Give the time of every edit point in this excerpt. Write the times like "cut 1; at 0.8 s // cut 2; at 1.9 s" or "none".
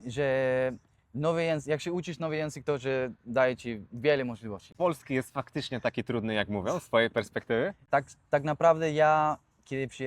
cut 1; at 4.6 s // cut 2; at 7.8 s